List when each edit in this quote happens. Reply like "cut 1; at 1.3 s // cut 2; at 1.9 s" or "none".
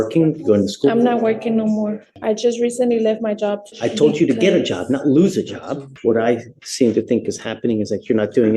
cut 1; at 2.0 s // cut 2; at 3.7 s // cut 3; at 5.9 s